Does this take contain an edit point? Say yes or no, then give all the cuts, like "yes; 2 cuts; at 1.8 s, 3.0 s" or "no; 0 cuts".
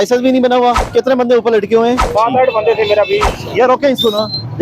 yes; 3 cuts; at 0.8 s, 2.0 s, 3.3 s